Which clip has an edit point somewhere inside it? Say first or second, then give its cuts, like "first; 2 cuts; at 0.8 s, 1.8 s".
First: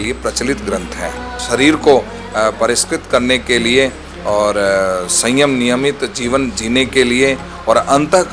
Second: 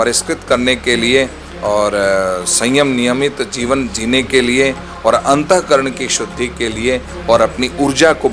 first; 1 cut; at 1.3 s